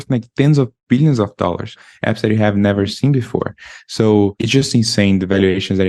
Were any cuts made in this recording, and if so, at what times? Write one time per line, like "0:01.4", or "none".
0:01.8
0:04.4